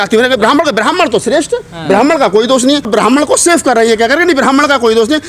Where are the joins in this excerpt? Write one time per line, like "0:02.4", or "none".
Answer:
0:02.9